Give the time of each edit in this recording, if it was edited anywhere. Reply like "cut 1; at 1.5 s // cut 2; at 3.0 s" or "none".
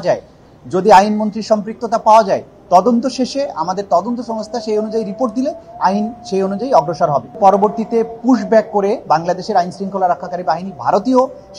cut 1; at 7.4 s